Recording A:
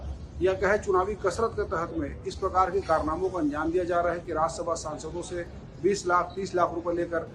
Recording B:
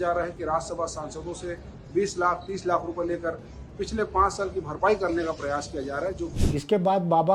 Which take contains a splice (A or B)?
B